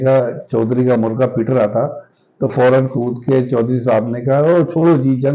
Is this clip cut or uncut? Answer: uncut